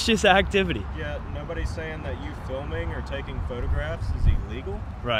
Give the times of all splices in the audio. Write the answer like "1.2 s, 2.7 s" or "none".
none